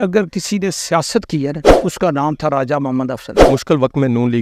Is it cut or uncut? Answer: cut